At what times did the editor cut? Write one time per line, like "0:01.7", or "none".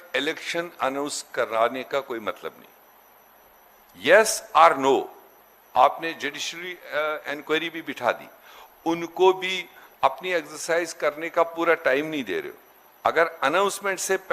none

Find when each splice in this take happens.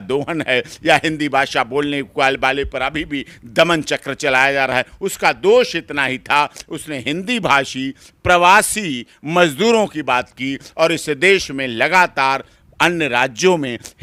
none

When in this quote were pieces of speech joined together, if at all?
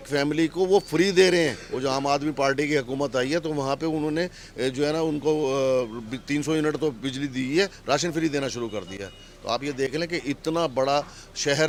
none

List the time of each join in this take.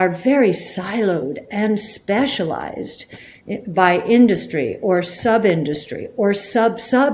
none

